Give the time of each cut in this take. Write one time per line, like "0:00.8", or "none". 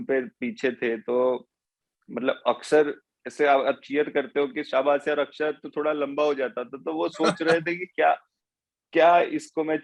none